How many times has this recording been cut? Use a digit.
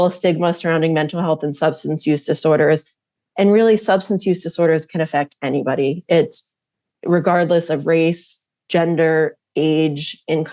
0